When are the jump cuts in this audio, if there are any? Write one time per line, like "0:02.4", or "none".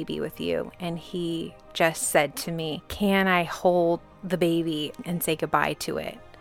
0:02.8
0:04.1
0:05.0